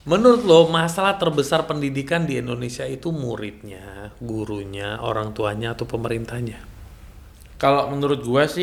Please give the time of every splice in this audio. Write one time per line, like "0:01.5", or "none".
none